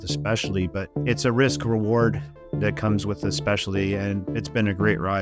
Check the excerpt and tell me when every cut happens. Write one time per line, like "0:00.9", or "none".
0:00.9
0:04.3